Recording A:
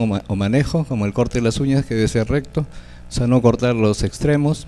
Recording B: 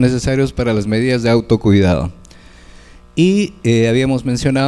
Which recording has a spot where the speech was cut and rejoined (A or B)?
A